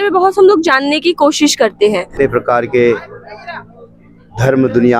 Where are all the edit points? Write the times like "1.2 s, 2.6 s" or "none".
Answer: 2.1 s